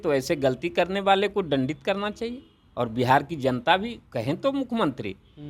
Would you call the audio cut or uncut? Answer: uncut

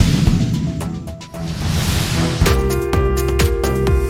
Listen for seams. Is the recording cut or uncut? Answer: uncut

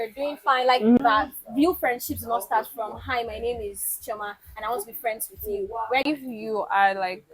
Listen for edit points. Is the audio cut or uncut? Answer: cut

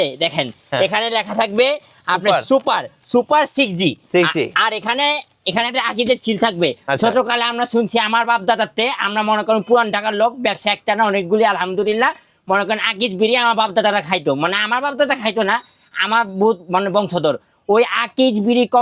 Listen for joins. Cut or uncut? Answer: uncut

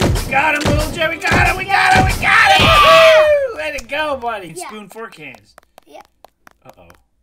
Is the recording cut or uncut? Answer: cut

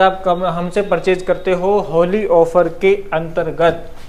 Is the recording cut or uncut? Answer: uncut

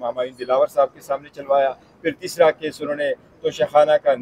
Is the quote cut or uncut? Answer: uncut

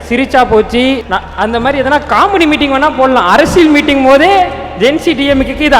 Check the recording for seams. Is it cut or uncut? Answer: cut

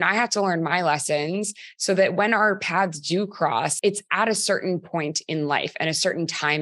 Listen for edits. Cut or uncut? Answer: cut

